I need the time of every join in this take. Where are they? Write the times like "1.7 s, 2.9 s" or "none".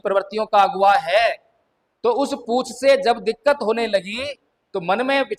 none